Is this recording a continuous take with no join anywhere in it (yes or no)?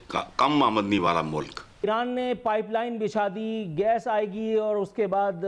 no